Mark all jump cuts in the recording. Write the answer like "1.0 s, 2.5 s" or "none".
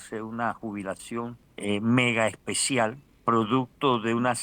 1.4 s, 3.1 s